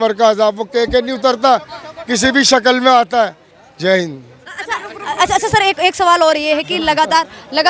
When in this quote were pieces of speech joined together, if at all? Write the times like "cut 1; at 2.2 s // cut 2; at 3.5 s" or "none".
none